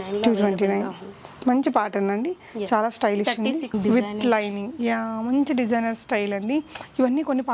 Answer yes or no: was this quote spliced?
yes